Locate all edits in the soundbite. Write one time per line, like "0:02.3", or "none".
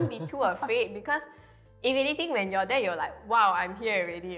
none

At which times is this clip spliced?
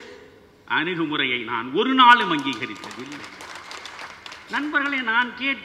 0:04.1

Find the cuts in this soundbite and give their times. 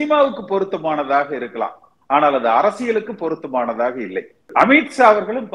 0:04.5

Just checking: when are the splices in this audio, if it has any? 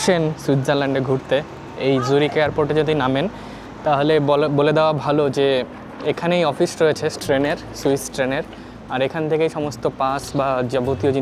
none

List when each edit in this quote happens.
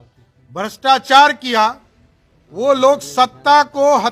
none

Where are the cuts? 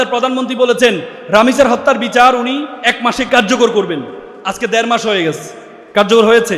0:01.1
0:03.3

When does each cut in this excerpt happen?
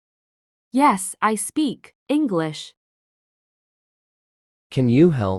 none

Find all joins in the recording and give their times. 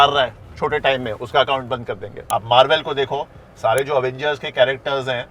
0:02.2

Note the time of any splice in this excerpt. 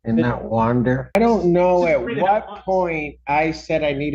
0:01.1

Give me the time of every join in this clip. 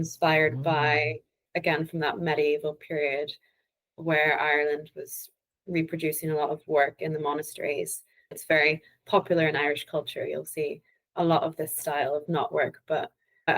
0:08.4

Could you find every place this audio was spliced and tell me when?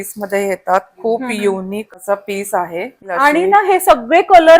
0:01.9
0:03.1

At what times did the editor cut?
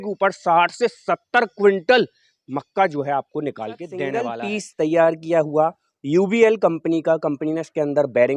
0:04.3

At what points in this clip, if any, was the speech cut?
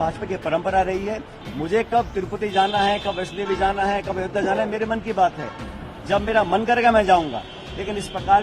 0:01.4

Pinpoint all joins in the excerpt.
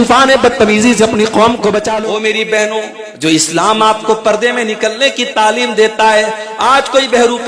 0:02.0
0:03.0

